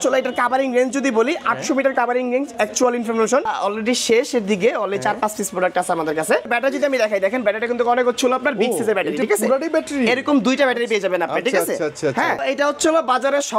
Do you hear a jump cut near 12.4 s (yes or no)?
yes